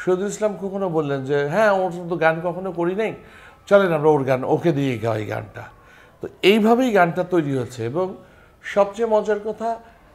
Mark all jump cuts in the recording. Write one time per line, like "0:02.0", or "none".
none